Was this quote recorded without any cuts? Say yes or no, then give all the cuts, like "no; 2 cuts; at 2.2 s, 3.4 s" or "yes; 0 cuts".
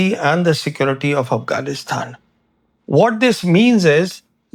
yes; 0 cuts